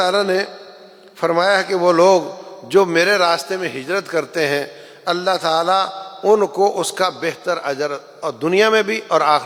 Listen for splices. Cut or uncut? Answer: uncut